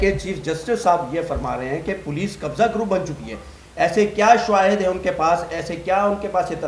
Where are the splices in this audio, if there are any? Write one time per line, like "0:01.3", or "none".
none